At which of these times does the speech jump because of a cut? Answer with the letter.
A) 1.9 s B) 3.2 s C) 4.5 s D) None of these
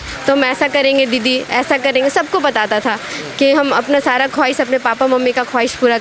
D